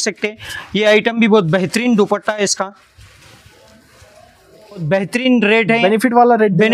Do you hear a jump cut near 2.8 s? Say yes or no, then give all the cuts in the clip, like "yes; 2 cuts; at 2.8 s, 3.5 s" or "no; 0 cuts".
no; 1 cut; at 4.8 s